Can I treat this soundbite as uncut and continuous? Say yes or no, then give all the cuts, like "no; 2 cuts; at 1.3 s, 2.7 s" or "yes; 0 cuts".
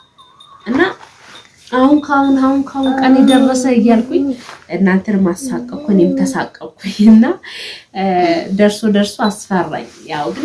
yes; 0 cuts